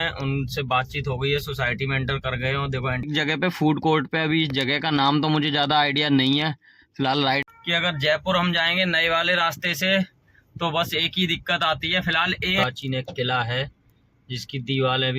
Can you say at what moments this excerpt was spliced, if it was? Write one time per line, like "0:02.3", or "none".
0:03.1
0:07.4
0:12.6